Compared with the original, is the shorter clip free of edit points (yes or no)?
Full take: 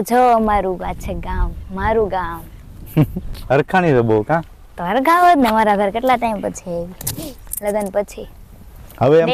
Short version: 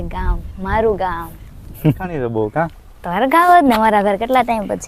no